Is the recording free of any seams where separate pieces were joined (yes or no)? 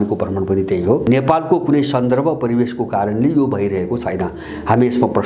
no